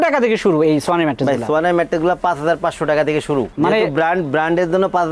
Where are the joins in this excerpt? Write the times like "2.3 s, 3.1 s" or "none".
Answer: none